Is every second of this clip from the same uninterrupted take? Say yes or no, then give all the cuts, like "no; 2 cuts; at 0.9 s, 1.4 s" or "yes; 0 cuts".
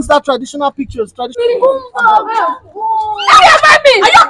no; 1 cut; at 1.4 s